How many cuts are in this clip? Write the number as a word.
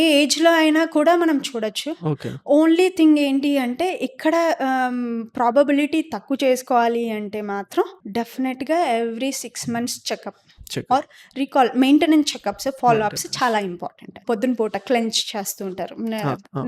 two